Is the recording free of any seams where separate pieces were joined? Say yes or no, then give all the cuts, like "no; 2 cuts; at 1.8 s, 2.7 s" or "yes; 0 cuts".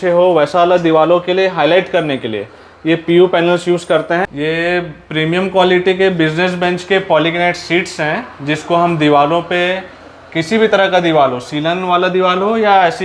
no; 1 cut; at 4.3 s